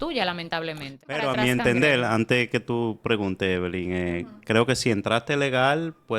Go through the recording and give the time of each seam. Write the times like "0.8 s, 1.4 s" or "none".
1.1 s